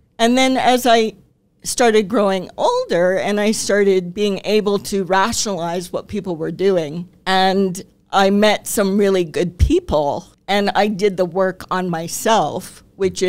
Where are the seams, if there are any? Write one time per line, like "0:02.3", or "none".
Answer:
0:07.1
0:10.3